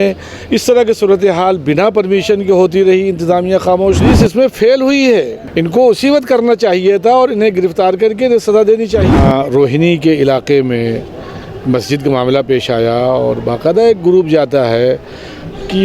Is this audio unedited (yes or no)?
no